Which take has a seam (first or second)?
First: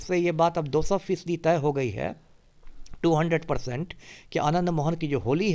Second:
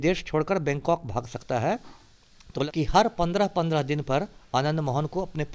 second